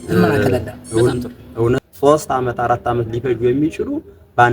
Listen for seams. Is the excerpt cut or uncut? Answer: cut